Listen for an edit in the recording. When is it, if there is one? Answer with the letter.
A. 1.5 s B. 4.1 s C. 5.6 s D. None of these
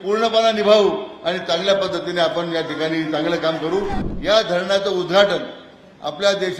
B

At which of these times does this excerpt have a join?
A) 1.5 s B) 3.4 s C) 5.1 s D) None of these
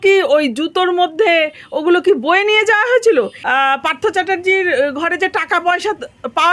B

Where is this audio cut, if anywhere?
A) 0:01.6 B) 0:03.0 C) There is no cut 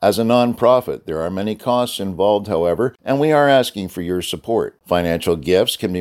B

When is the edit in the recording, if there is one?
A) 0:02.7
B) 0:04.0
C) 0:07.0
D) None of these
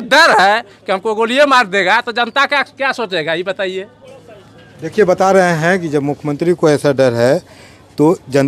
D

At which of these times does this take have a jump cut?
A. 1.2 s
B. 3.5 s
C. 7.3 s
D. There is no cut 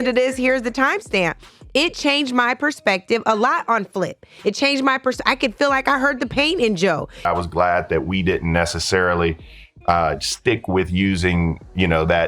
C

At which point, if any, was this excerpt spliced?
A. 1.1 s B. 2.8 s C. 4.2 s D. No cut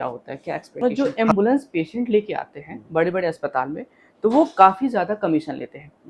A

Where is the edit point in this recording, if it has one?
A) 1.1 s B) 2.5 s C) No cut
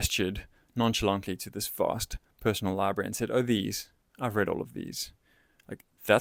C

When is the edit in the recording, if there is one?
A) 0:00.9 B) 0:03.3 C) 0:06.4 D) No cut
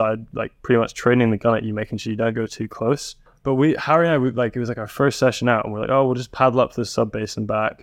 B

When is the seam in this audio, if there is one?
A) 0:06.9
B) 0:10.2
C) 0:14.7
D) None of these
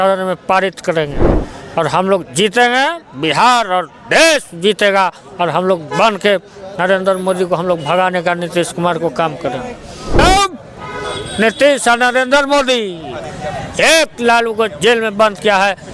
B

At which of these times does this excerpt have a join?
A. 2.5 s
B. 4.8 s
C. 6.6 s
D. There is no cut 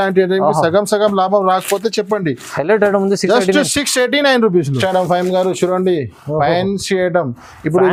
D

